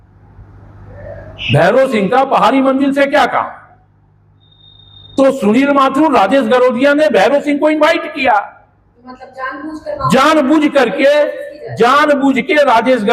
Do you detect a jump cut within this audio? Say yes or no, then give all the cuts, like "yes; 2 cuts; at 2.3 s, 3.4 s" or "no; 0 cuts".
no; 0 cuts